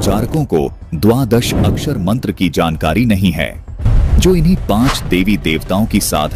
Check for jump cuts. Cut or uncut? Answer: uncut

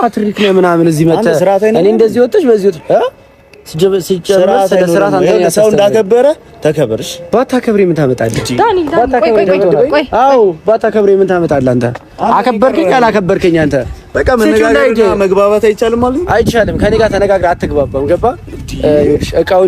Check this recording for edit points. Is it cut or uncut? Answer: uncut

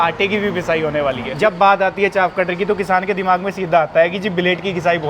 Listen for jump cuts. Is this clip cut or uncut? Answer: cut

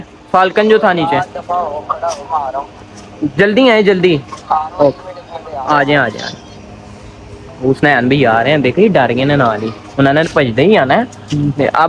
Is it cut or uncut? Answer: uncut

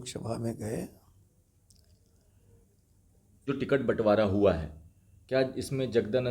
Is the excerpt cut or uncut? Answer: cut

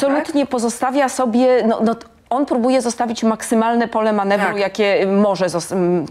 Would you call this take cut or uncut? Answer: uncut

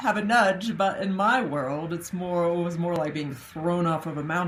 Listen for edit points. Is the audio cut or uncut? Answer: uncut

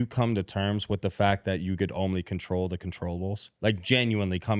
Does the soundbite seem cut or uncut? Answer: uncut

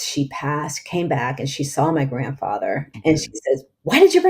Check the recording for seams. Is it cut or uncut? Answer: cut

